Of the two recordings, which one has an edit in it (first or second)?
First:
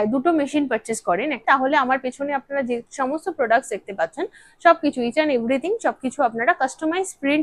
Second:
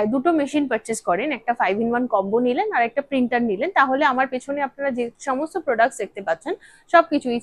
first